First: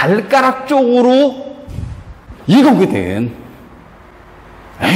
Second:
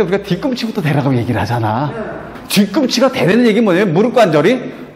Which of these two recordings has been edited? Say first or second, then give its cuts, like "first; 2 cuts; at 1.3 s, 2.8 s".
second; 1 cut; at 2.3 s